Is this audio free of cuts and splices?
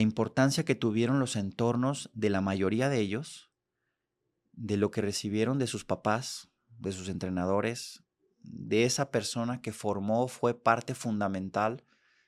yes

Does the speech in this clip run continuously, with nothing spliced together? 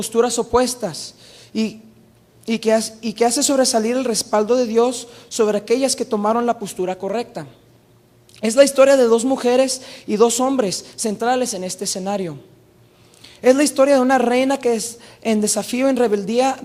yes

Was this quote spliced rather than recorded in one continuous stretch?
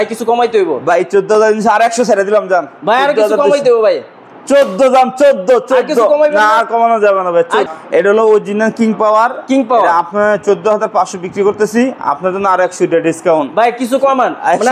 yes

